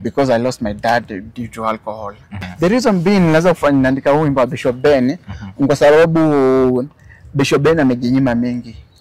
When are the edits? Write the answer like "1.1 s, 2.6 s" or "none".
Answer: 2.4 s